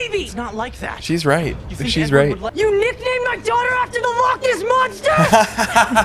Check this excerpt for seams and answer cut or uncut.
cut